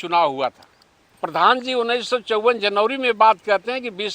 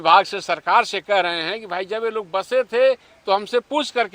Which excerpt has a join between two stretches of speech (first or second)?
first